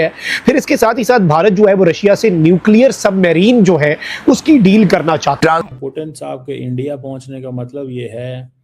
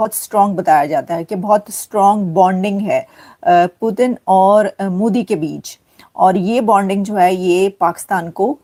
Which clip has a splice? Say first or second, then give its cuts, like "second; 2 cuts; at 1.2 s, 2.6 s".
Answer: first; 1 cut; at 5.4 s